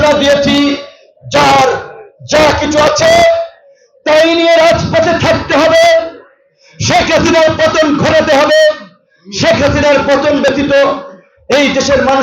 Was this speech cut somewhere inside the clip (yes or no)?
no